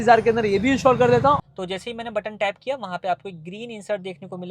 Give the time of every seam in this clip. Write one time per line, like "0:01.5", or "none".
0:01.4